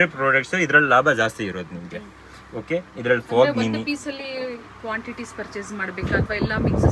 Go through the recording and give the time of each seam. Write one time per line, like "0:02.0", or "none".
none